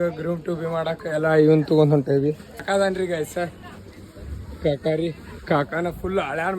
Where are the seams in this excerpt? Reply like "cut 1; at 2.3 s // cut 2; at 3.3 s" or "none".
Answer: cut 1; at 2.6 s

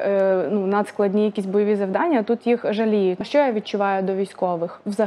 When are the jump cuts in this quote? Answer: cut 1; at 3.2 s

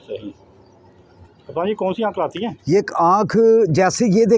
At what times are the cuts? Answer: none

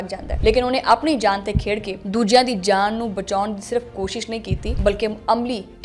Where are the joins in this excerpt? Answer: cut 1; at 4.7 s

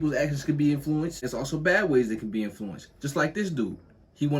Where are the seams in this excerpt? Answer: cut 1; at 1.2 s

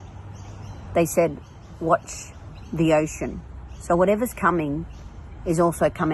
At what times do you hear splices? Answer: none

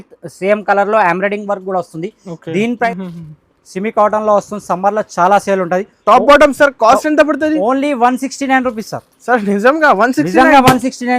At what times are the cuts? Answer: cut 1; at 2.9 s

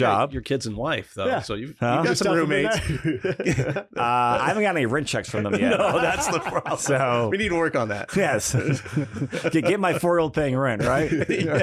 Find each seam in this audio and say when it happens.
none

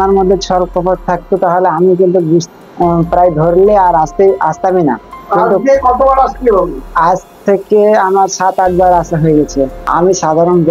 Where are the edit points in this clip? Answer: cut 1; at 9.8 s

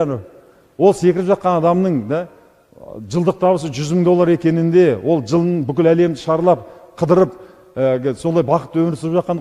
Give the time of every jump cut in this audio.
none

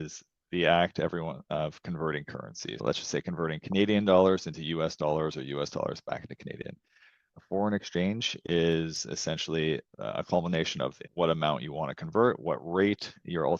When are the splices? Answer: none

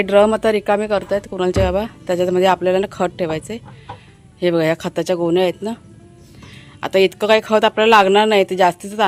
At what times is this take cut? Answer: none

